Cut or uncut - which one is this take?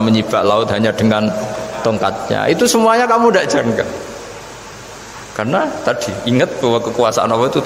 uncut